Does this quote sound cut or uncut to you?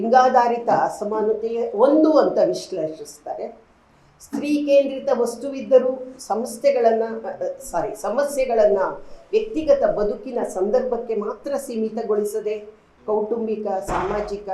uncut